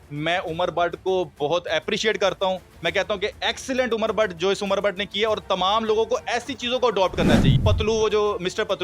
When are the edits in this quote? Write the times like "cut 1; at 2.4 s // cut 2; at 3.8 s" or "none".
cut 1; at 7.5 s